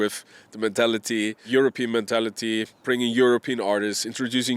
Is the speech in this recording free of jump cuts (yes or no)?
no